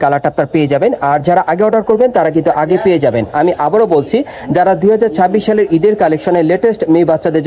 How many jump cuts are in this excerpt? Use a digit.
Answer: 0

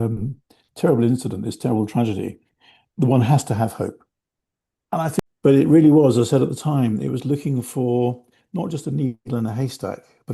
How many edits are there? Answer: 1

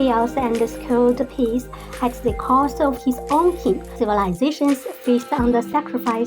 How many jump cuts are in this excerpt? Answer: 1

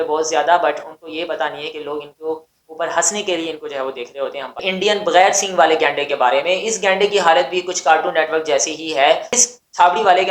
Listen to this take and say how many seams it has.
2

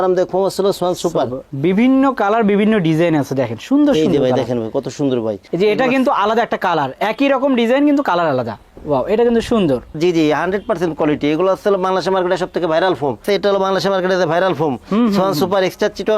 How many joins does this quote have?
4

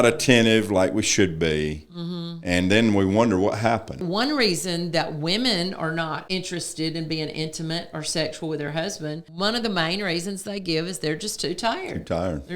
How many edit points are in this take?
3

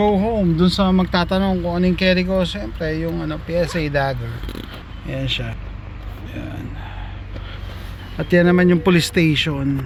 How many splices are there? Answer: 0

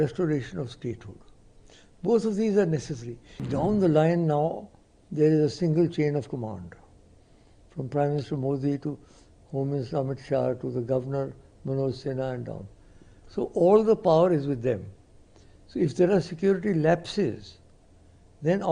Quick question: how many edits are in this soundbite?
1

